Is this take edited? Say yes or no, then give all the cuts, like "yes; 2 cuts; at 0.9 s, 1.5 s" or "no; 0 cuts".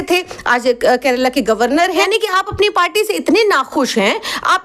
yes; 1 cut; at 2.1 s